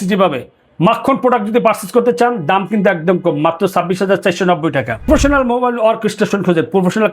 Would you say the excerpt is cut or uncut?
cut